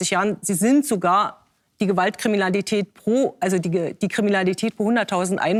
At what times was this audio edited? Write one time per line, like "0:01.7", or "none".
none